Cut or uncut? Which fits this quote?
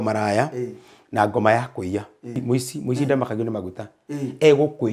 cut